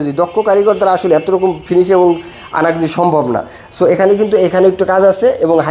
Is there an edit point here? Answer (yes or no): no